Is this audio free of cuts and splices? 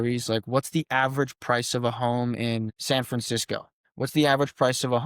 no; 2 cuts; at 2.8 s, 3.8 s

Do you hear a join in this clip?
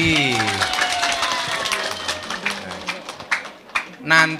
no; 0 cuts

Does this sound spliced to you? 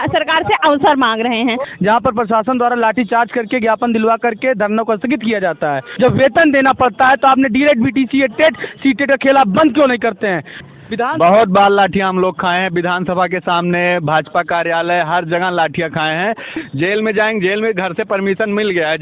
yes; 4 cuts; at 1.7 s, 5.9 s, 10.6 s, 16.5 s

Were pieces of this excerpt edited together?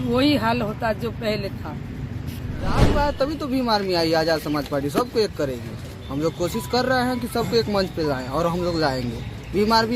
yes; 1 cut; at 2.8 s

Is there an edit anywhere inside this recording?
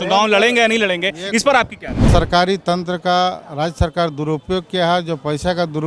yes; 1 cut; at 2.1 s

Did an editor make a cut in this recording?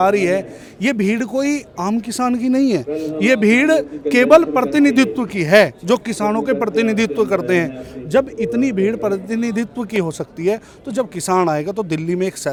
no; 0 cuts

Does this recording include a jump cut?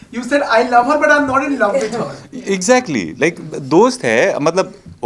no; 0 cuts

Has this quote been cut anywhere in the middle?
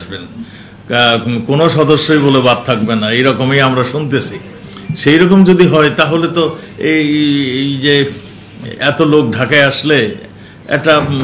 no; 0 cuts

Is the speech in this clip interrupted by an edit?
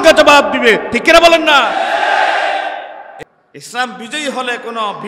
yes; 1 cut; at 3.0 s

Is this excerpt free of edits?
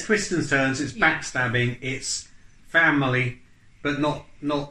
yes; 0 cuts

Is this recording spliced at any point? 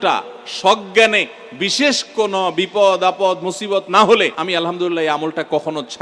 yes; 1 cut; at 4.4 s

